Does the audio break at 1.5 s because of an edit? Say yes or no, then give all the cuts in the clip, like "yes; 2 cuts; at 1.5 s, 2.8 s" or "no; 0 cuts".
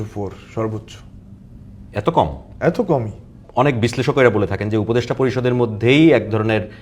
no; 1 cut; at 3.4 s